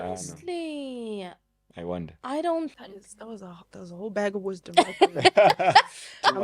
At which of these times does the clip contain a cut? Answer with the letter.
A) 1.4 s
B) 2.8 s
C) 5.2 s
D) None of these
B